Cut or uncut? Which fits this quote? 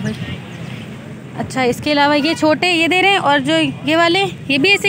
uncut